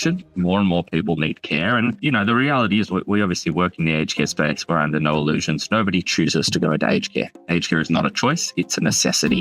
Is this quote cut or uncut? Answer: cut